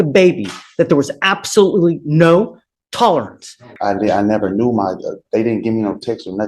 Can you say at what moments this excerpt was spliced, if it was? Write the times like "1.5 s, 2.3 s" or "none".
3.7 s